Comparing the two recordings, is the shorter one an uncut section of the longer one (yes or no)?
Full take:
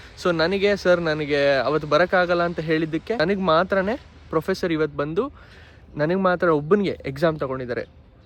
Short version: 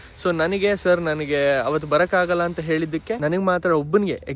no